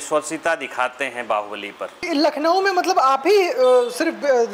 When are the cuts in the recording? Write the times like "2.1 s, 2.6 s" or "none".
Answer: 2.1 s